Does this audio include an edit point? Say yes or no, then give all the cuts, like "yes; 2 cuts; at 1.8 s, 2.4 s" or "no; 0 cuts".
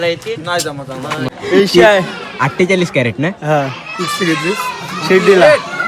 yes; 1 cut; at 1.2 s